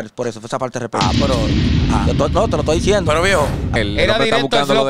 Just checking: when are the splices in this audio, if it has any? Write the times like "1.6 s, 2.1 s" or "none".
3.7 s